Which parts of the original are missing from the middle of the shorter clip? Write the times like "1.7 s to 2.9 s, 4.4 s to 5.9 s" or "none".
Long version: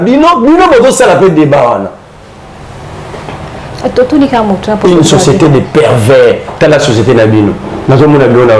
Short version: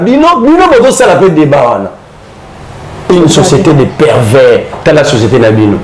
3.0 s to 4.8 s